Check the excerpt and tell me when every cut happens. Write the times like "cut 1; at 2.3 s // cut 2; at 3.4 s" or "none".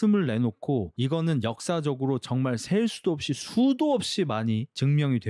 none